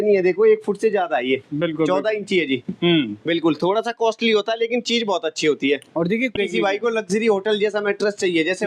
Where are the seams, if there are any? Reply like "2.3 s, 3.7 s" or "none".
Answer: 6.3 s